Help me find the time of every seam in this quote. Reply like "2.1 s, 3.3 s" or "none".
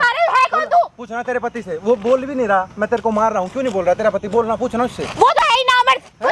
none